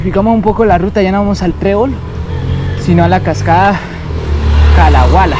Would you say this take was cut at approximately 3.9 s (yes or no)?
no